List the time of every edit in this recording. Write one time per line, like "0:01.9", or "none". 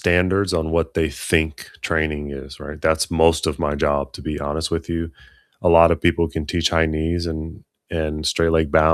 none

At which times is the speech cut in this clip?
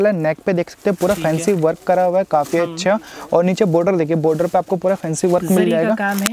none

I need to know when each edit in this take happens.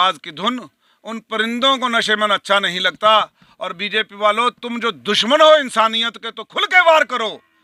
none

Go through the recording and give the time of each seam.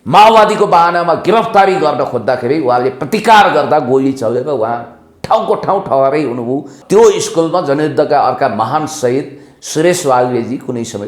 0:06.7

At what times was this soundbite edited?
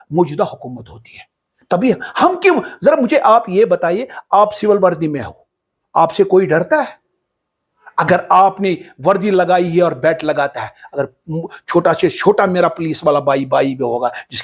none

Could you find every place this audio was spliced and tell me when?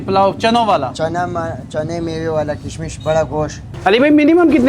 0:03.7

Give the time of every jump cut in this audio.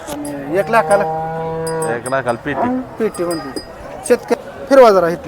0:04.4

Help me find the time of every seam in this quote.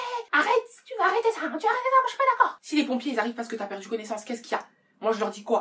0:02.7

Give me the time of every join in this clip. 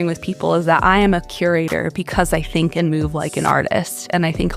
none

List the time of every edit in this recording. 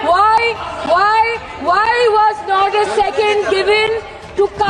none

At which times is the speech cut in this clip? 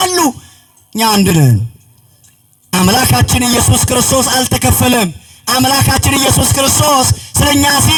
none

